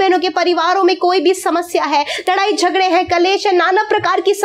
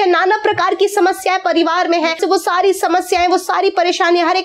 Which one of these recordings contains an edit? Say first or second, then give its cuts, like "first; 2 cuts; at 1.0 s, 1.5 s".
second; 1 cut; at 2.2 s